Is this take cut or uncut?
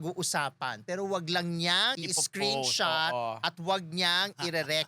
cut